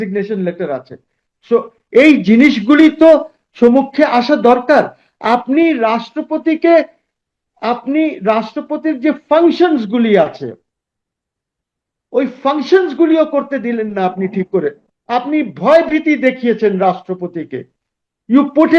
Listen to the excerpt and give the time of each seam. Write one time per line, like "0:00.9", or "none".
0:14.8

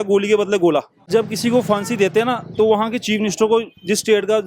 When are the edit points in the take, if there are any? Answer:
0:01.0

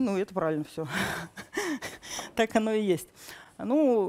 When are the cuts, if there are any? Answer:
none

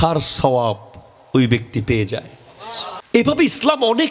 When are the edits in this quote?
0:03.2

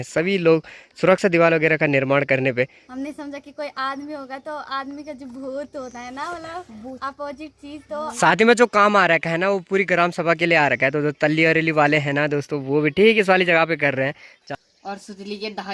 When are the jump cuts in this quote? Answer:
0:02.8
0:08.1
0:14.2

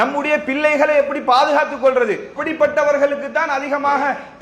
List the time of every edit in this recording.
0:02.4

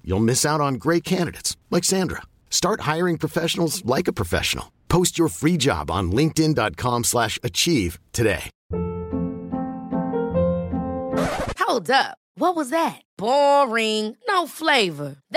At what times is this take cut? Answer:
0:08.5

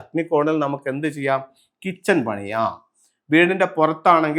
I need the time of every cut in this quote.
none

